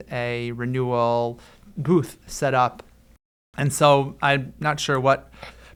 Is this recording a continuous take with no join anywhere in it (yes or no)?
yes